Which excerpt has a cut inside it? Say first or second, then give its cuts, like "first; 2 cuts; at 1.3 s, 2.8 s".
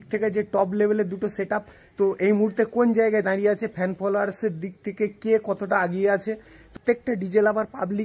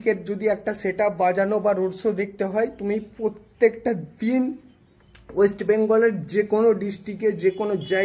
first; 1 cut; at 6.7 s